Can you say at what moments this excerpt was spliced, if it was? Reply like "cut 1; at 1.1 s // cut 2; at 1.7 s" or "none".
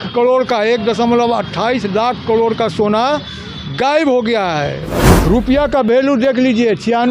cut 1; at 5.2 s

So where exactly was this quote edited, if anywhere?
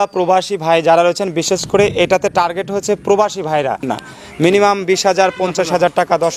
cut 1; at 3.8 s

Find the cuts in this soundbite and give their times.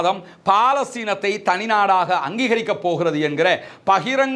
none

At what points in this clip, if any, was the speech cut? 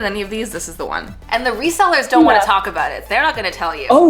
cut 1; at 1.2 s

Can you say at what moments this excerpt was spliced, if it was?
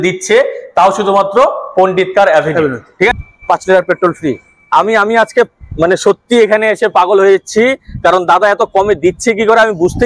cut 1; at 3.2 s

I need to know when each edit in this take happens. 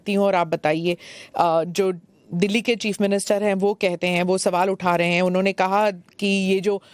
none

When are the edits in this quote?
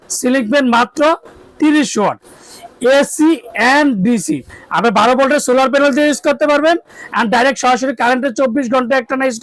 none

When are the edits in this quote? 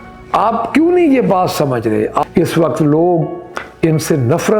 cut 1; at 2.2 s

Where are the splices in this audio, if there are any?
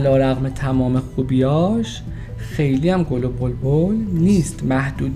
none

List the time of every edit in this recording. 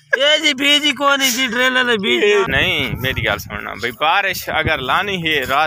cut 1; at 2.5 s

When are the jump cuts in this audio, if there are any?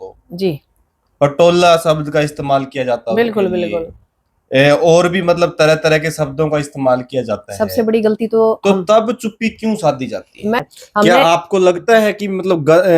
cut 1; at 10.6 s

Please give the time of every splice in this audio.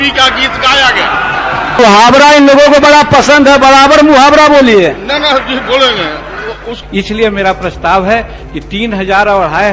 cut 1; at 6.8 s

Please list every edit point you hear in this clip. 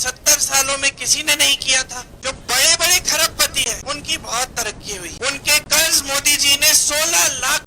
cut 1; at 2.1 s // cut 2; at 3.8 s // cut 3; at 5.1 s

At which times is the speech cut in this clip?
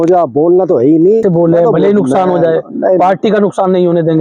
cut 1; at 1.2 s

